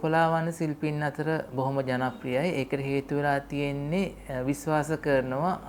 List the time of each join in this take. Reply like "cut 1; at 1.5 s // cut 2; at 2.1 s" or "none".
none